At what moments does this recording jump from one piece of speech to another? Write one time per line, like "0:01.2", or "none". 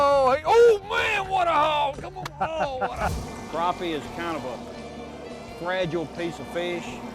0:03.1